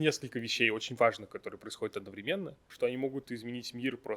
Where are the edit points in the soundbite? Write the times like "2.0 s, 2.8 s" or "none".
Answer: 2.6 s